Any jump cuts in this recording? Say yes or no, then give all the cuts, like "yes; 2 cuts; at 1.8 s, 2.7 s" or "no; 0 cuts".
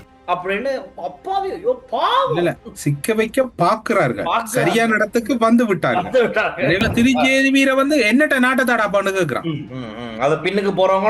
yes; 2 cuts; at 2.7 s, 6.8 s